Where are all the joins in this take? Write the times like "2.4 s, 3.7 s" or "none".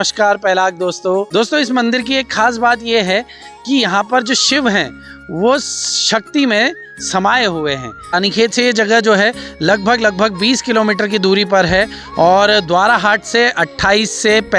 1.3 s, 8.2 s